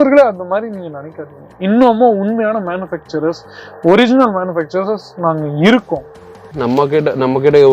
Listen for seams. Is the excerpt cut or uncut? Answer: cut